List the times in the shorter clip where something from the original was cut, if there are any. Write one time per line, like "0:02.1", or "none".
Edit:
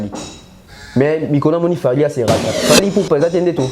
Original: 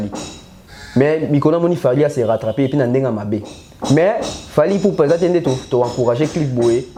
0:02.5